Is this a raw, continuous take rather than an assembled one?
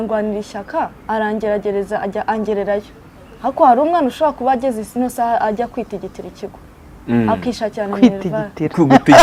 yes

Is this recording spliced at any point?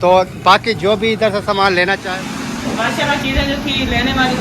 yes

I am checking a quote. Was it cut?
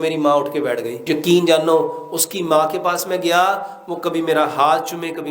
yes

